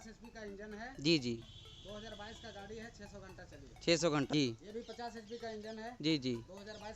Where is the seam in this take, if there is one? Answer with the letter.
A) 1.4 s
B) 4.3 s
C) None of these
B